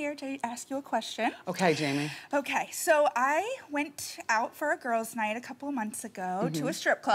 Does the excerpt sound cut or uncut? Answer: cut